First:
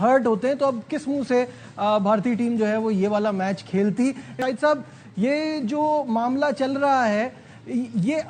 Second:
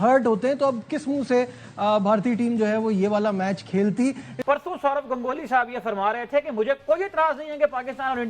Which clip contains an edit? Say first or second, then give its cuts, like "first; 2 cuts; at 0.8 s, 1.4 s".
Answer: second; 1 cut; at 4.3 s